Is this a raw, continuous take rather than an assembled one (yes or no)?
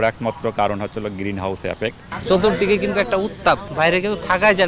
no